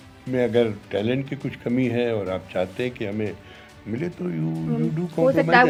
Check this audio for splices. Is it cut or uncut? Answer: uncut